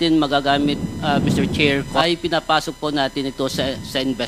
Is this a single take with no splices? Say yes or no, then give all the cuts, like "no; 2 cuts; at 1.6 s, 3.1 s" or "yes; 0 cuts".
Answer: no; 1 cut; at 2.0 s